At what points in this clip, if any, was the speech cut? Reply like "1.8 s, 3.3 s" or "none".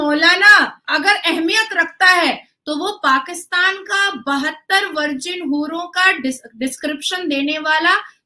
none